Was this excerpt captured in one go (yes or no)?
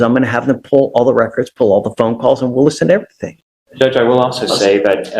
yes